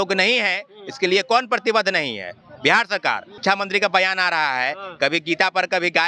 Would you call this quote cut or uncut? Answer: cut